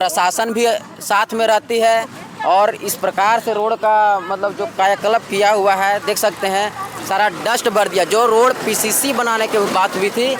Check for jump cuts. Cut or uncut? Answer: uncut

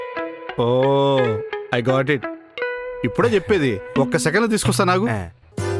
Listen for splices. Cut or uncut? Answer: uncut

